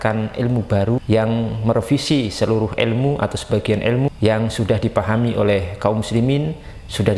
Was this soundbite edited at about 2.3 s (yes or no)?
no